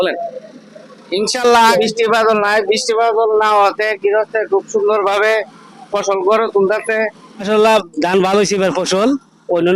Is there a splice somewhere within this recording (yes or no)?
yes